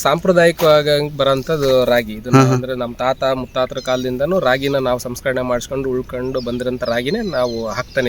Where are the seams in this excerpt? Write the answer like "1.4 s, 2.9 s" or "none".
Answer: none